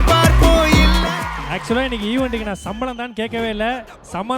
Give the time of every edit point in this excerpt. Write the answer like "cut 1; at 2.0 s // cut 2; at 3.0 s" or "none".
cut 1; at 1.3 s